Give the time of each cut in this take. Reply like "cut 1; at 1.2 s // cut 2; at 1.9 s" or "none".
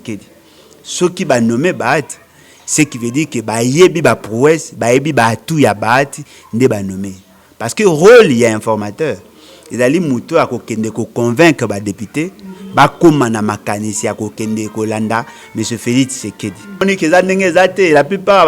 cut 1; at 16.8 s